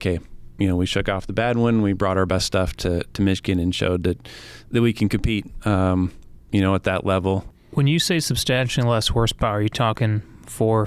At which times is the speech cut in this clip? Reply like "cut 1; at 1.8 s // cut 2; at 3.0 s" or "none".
cut 1; at 7.5 s